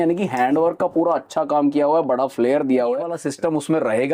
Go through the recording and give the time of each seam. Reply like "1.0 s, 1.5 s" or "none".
3.2 s